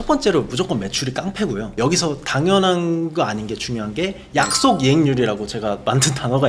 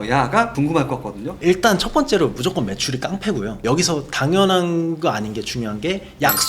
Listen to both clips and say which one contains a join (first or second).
second